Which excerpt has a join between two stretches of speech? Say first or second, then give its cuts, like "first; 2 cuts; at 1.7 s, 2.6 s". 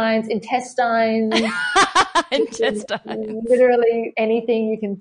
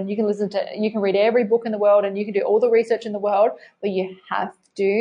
first; 1 cut; at 4.1 s